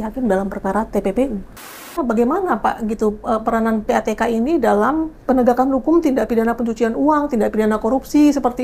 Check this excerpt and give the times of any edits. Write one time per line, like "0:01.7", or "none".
0:01.6
0:05.2

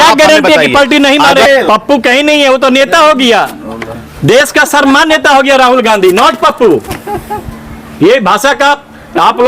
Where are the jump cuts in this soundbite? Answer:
0:01.4

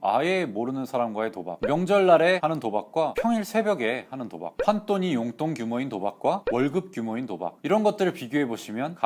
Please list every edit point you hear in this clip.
none

